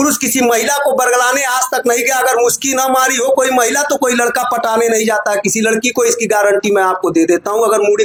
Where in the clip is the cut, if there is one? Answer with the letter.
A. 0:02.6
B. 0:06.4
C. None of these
C